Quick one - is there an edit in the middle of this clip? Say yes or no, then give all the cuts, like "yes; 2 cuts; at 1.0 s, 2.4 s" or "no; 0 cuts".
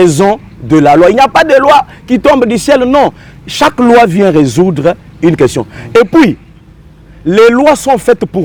no; 0 cuts